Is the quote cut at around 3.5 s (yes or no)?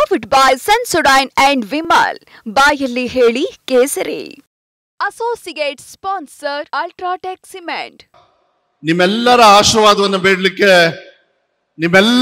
no